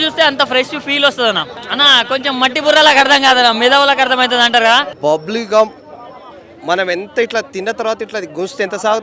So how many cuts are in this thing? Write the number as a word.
two